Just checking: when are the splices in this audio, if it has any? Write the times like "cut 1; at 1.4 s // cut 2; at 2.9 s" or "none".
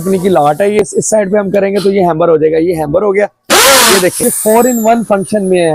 cut 1; at 0.8 s // cut 2; at 4.2 s